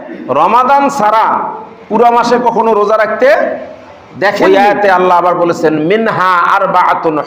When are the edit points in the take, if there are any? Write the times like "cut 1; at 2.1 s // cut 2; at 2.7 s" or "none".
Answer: cut 1; at 4.4 s